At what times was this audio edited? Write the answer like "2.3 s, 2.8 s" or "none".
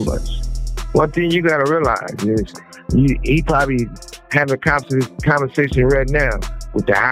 none